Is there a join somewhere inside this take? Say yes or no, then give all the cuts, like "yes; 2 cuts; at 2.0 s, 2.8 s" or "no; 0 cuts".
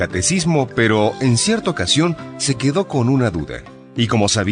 no; 0 cuts